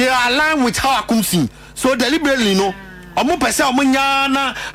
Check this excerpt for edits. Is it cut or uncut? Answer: uncut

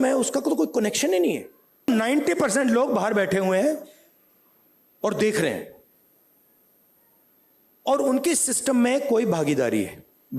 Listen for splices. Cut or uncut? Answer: cut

